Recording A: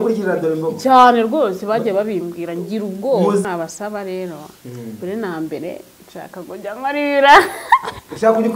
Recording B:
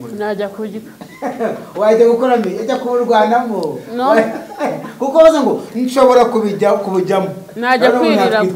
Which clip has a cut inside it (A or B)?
A